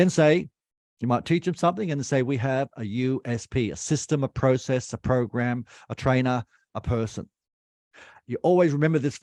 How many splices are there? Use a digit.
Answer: 0